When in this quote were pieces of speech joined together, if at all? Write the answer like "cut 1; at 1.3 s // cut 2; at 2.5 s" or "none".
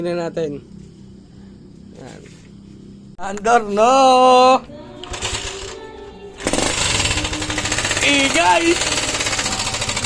cut 1; at 3.1 s